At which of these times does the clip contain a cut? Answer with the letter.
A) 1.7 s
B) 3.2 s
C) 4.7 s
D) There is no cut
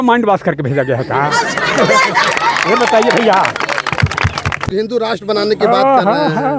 C